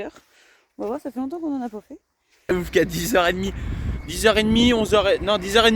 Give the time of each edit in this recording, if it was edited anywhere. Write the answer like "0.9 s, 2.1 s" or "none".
2.5 s